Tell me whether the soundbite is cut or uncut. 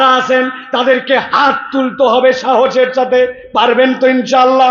uncut